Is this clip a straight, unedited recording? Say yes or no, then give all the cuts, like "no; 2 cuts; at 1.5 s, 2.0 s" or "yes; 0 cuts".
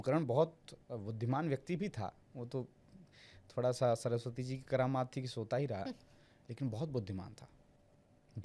yes; 0 cuts